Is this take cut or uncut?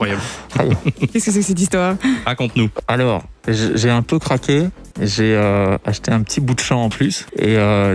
cut